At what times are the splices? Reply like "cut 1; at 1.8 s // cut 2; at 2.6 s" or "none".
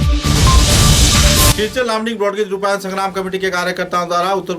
cut 1; at 1.5 s